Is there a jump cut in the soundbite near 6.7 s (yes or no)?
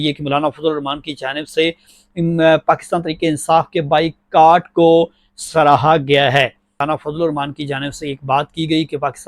yes